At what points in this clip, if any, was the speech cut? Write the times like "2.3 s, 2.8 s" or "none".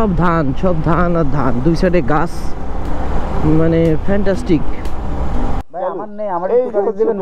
5.6 s